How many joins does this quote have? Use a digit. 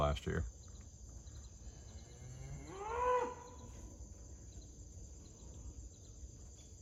0